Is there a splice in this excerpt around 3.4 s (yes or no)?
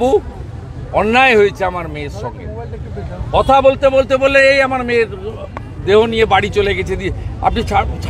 no